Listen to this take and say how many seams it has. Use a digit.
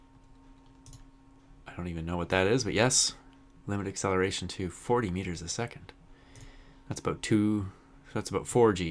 1